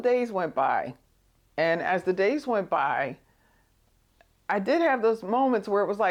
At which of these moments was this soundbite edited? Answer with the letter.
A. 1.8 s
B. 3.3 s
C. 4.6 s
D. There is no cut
D